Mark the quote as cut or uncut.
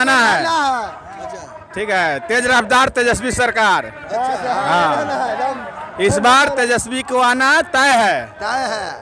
uncut